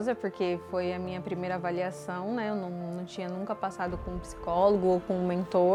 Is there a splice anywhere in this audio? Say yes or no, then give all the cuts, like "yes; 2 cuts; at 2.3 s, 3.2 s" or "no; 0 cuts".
no; 0 cuts